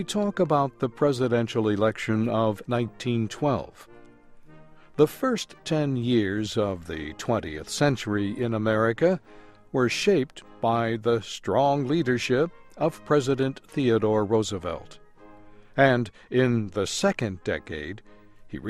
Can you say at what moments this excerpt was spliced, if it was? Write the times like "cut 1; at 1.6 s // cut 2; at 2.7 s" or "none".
none